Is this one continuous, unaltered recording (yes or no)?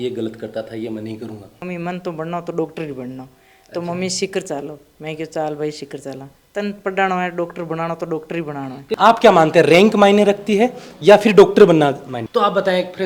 no